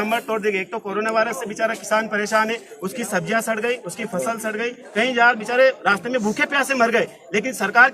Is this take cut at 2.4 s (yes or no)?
no